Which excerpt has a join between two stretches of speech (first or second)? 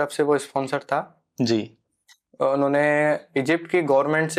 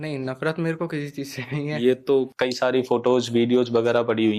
second